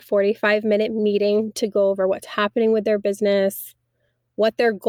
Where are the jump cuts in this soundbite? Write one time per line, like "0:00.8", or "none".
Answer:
none